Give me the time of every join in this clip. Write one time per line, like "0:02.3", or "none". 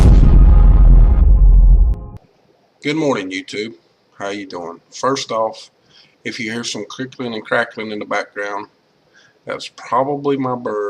0:01.3